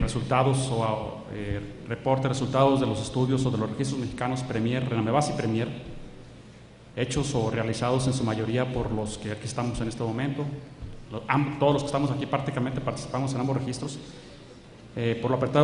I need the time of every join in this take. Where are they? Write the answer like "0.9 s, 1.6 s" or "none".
7.9 s